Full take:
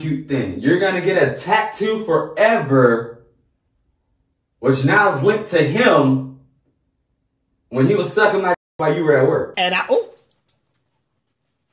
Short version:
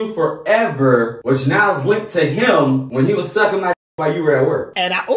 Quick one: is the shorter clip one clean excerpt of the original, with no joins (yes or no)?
no